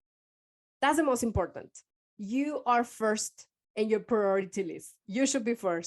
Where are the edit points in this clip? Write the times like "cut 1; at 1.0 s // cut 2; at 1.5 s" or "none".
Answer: none